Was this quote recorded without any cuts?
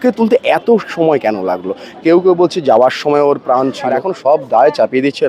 no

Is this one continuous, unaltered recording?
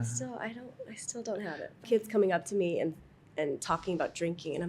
no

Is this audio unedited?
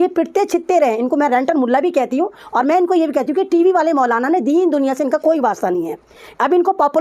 yes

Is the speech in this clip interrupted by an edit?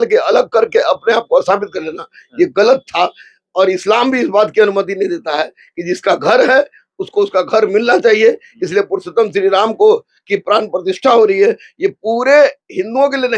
no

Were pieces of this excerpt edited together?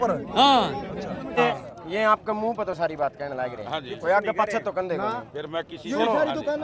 yes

